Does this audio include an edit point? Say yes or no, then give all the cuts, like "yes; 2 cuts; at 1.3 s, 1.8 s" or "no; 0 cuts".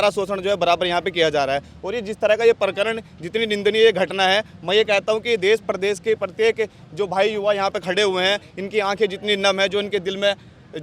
no; 0 cuts